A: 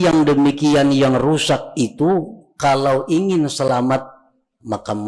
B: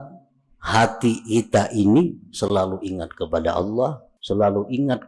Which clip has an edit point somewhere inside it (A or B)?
B